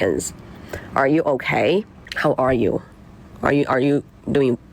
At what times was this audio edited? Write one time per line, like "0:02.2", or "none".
0:02.0